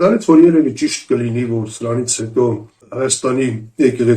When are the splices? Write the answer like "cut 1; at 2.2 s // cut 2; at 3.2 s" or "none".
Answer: cut 1; at 2.8 s